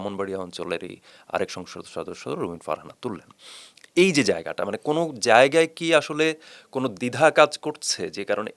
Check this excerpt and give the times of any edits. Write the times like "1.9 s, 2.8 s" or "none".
none